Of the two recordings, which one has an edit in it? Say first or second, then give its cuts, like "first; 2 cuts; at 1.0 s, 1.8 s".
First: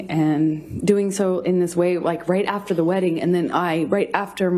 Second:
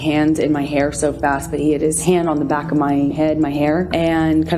second; 2 cuts; at 2.0 s, 3.3 s